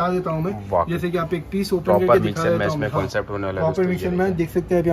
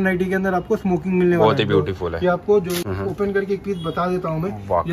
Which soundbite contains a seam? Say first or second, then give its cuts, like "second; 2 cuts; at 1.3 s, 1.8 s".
second; 1 cut; at 2.9 s